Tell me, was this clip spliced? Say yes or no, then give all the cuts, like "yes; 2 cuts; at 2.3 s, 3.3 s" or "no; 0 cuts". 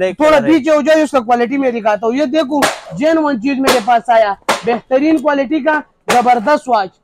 no; 0 cuts